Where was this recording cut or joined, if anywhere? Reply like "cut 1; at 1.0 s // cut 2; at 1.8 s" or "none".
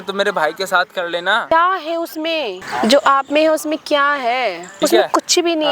cut 1; at 1.4 s // cut 2; at 2.6 s // cut 3; at 4.6 s